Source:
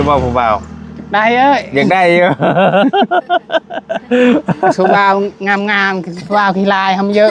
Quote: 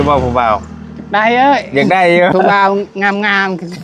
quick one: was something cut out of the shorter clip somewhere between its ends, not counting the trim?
yes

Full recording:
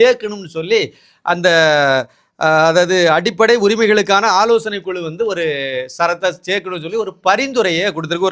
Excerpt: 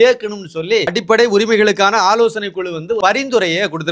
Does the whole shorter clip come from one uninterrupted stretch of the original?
no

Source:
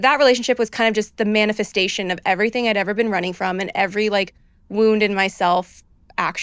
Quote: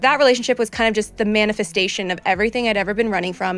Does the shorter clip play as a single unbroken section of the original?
yes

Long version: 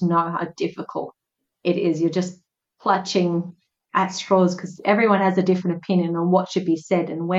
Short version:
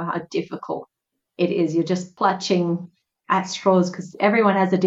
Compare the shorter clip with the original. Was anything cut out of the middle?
yes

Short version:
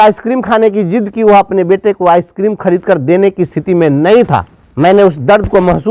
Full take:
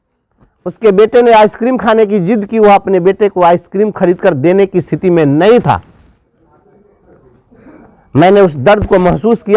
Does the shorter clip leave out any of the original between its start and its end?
yes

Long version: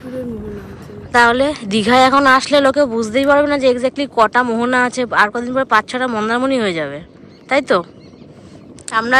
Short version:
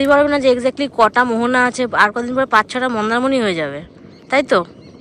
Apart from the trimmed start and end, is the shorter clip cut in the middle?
no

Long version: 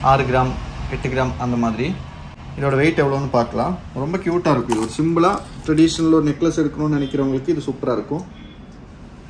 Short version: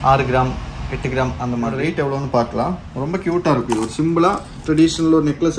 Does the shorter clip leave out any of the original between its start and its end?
yes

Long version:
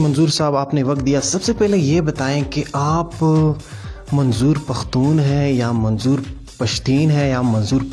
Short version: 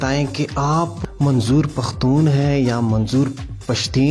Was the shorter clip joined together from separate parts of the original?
yes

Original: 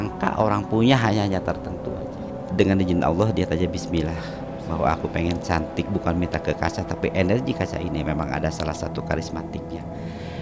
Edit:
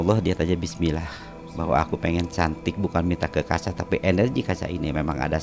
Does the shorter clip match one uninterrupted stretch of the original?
yes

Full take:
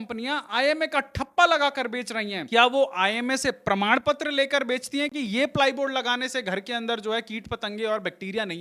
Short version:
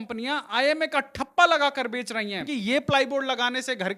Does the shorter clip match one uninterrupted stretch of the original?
no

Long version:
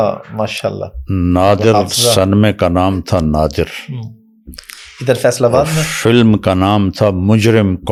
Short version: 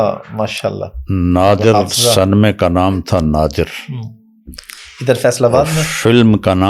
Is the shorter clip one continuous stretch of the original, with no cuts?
yes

